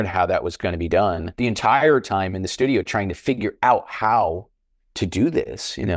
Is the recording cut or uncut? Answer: cut